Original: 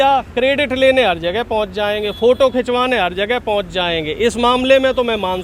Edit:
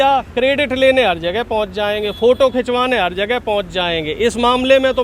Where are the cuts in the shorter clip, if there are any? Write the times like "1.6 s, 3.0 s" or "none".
none